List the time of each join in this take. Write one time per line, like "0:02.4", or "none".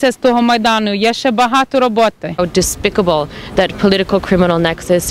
0:02.4

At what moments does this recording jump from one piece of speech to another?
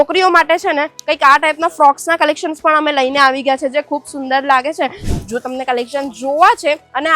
0:05.0

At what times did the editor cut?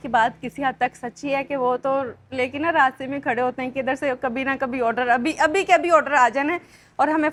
none

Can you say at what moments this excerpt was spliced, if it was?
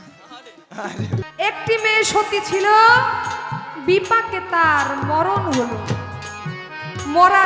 0:01.3

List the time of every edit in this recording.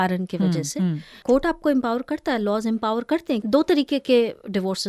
0:01.2
0:03.4

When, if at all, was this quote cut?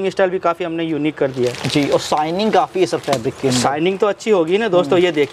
none

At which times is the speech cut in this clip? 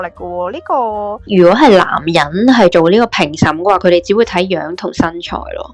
0:01.3

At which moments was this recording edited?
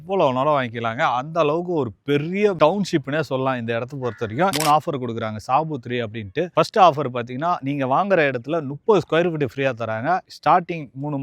0:04.6

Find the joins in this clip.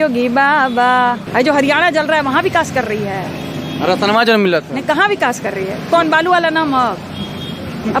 0:01.2

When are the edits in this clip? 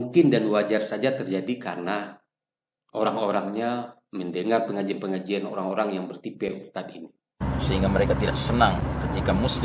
0:07.4

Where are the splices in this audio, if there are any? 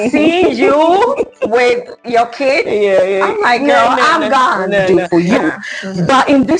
0:04.9

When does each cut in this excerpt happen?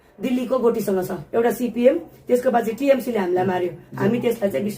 0:01.2

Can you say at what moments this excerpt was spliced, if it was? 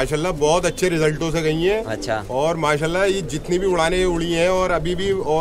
none

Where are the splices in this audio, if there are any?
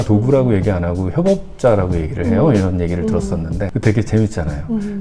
0:03.7

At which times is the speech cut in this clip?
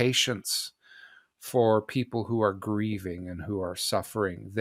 none

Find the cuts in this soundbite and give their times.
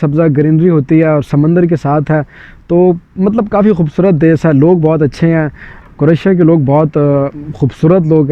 none

